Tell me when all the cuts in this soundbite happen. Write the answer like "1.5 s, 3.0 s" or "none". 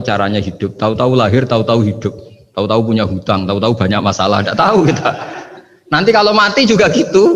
none

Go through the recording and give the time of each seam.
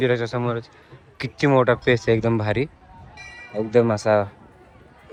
none

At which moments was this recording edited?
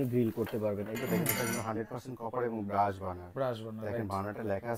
0.9 s

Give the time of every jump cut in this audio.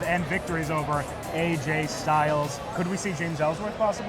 2.7 s

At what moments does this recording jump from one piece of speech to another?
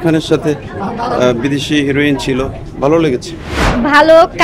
3.5 s

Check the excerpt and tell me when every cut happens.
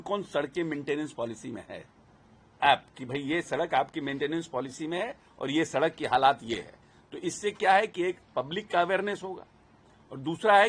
2.6 s

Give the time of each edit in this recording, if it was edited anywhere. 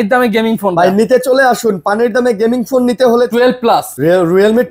3.6 s

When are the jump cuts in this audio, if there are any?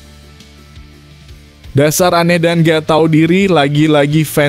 1.7 s

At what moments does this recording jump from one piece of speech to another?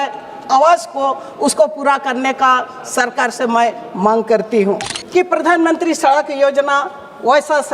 4.9 s

